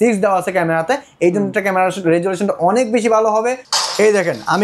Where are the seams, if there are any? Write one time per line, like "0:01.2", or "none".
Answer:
0:03.7